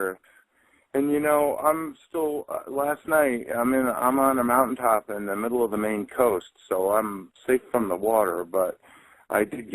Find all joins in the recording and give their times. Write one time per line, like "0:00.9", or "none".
0:03.9